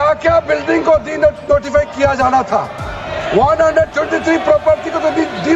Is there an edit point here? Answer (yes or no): no